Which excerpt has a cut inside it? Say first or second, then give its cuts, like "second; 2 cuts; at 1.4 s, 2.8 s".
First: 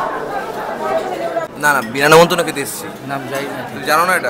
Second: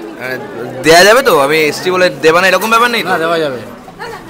first; 1 cut; at 1.5 s